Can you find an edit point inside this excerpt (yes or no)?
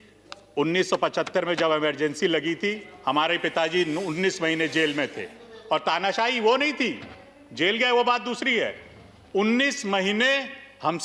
no